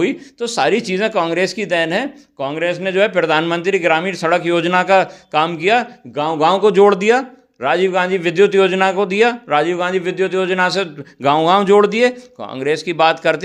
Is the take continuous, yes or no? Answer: yes